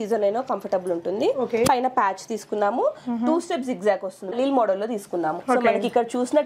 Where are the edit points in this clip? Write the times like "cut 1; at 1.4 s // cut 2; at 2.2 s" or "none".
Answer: cut 1; at 1.7 s // cut 2; at 4.3 s // cut 3; at 5.4 s